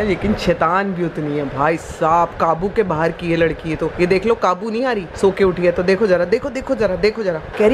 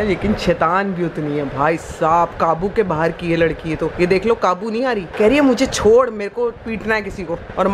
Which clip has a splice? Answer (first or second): second